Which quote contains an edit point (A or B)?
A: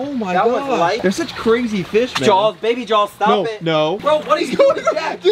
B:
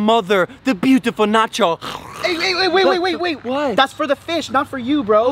A